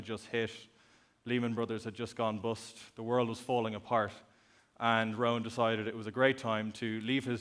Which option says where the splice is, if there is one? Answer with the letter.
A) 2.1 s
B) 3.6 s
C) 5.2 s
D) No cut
A